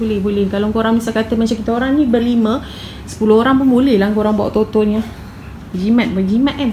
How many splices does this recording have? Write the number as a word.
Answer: zero